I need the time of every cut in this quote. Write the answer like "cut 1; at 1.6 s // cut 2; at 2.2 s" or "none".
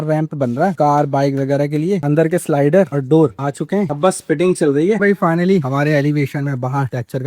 cut 1; at 2.0 s // cut 2; at 3.9 s // cut 3; at 5.0 s